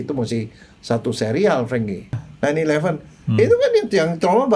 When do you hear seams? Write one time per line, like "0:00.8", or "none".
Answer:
0:02.2